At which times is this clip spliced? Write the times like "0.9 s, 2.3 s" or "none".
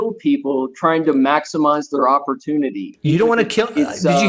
2.9 s

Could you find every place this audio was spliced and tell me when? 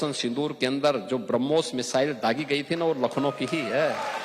none

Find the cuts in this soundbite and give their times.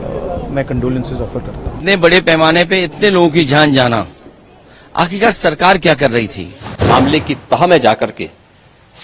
1.8 s, 6.7 s

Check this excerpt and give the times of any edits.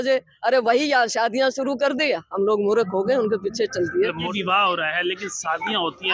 4.3 s

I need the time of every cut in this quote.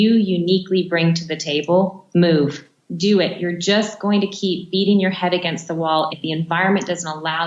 2.0 s, 2.7 s, 6.1 s

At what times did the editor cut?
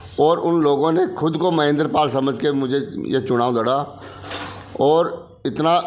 none

